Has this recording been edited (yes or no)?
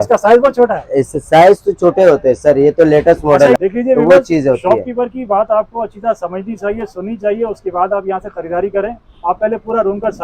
yes